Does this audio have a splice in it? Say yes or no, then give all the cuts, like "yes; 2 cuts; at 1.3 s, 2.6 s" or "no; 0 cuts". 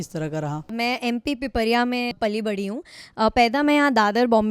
yes; 2 cuts; at 0.7 s, 2.2 s